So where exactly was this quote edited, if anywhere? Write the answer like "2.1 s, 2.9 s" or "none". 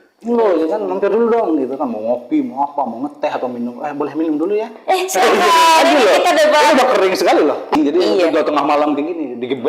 7.7 s